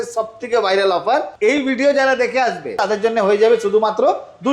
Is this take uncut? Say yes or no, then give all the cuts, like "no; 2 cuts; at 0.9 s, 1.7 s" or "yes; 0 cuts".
no; 2 cuts; at 1.3 s, 2.8 s